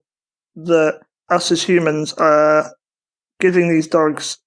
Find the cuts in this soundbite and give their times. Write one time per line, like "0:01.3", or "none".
0:01.1